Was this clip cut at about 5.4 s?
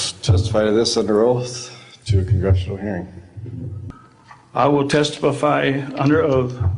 no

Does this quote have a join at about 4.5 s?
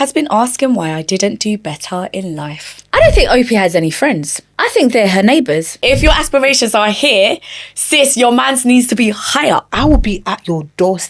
no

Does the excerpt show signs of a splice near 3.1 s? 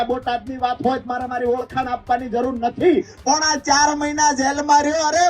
yes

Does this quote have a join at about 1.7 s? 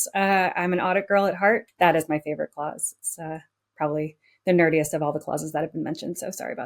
yes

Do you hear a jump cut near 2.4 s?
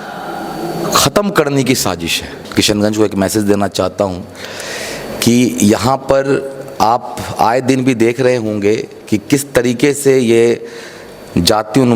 yes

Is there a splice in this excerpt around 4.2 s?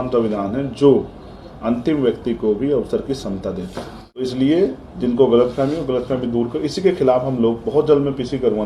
yes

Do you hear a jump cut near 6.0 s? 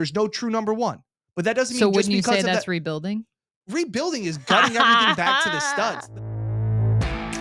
yes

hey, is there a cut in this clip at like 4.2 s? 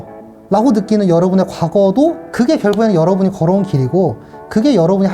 no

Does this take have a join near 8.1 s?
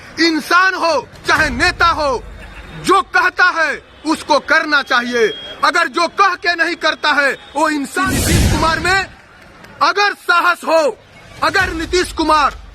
yes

